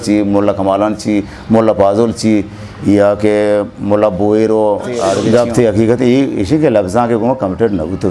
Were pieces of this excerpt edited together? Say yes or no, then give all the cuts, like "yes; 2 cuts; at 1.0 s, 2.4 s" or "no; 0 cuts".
yes; 1 cut; at 5.2 s